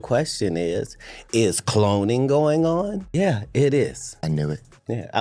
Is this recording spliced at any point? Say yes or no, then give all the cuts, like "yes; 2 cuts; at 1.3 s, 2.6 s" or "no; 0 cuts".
yes; 2 cuts; at 3.0 s, 4.1 s